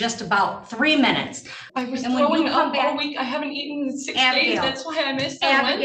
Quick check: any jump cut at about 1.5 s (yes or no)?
yes